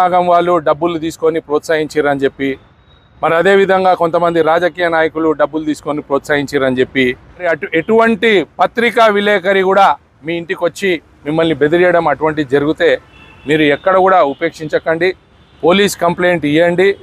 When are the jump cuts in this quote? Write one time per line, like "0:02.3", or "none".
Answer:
0:07.4